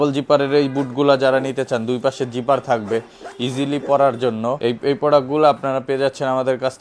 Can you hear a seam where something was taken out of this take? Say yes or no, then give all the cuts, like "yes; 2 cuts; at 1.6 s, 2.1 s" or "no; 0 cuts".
no; 0 cuts